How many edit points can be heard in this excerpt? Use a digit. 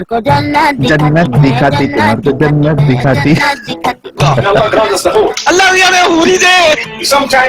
0